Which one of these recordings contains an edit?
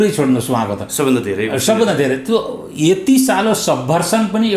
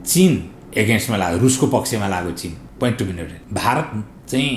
second; 2 cuts; at 2.6 s, 3.3 s

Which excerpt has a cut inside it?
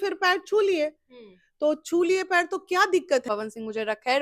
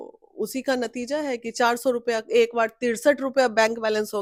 first; 1 cut; at 3.2 s

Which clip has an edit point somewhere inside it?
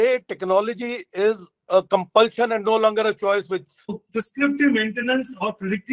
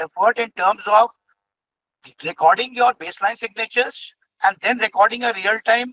first; 1 cut; at 4.0 s

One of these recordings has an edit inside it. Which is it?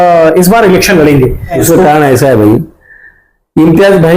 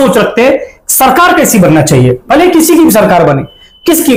first; 1 cut; at 1.6 s

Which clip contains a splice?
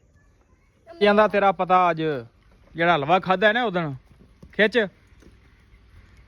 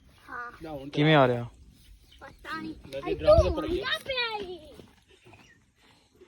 first; 1 cut; at 1.0 s

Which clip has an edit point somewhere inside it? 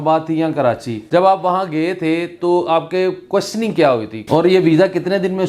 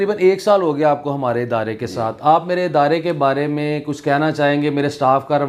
first; 2 cuts; at 0.9 s, 4.1 s

